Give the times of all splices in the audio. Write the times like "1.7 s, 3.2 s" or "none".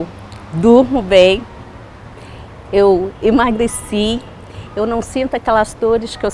none